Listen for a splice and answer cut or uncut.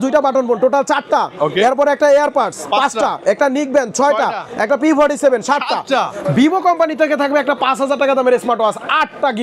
uncut